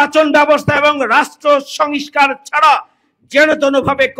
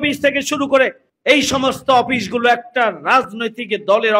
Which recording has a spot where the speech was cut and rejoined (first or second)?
second